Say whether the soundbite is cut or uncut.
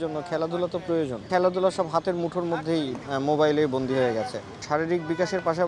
cut